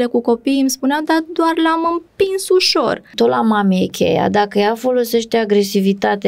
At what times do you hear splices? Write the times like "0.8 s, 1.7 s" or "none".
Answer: 3.1 s